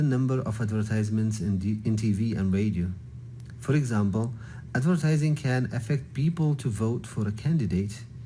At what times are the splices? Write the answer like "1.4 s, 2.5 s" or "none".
1.5 s, 2.7 s, 4.2 s